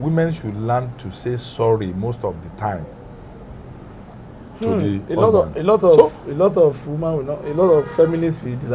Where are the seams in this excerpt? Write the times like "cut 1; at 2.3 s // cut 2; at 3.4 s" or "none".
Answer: none